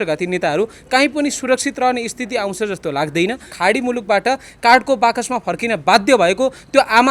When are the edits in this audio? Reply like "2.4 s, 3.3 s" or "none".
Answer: 3.5 s